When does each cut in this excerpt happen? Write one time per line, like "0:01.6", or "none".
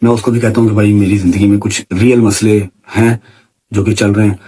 none